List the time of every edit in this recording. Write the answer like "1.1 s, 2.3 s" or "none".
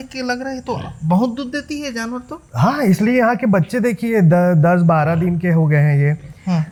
none